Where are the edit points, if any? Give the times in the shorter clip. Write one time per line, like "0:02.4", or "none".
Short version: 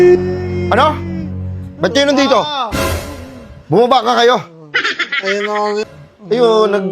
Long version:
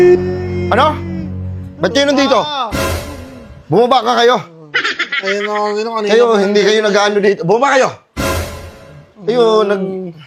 0:05.9